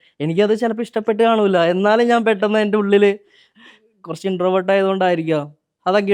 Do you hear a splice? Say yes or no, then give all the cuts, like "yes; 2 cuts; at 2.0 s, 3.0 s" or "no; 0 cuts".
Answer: no; 0 cuts